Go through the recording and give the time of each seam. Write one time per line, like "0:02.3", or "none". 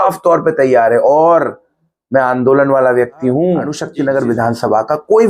0:03.7